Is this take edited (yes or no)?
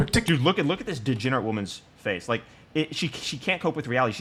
no